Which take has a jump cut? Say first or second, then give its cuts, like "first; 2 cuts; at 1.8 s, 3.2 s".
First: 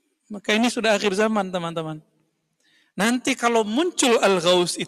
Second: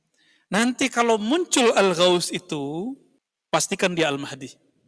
second; 1 cut; at 3.6 s